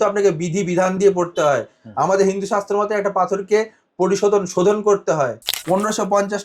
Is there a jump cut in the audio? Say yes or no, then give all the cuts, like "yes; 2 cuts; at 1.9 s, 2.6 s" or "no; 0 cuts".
yes; 1 cut; at 5.5 s